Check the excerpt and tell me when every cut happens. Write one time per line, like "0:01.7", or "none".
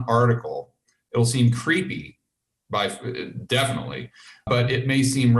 0:01.0
0:04.4